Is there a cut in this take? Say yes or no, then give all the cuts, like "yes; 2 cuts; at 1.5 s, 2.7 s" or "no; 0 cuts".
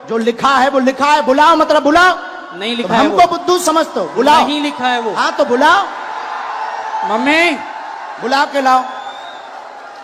no; 0 cuts